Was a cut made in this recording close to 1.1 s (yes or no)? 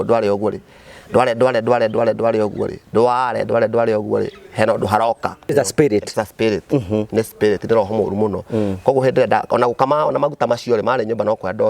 no